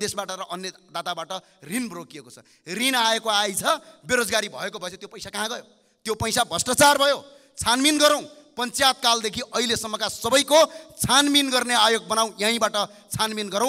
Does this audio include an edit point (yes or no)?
no